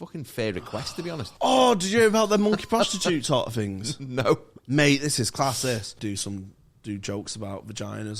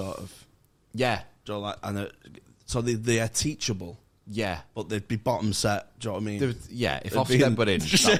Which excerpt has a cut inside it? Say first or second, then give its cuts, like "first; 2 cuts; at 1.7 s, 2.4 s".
first; 2 cuts; at 1.3 s, 5.9 s